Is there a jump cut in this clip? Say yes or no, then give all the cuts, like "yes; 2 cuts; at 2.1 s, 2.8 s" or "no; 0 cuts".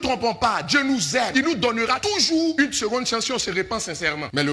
no; 0 cuts